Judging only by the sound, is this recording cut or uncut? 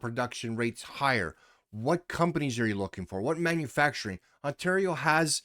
uncut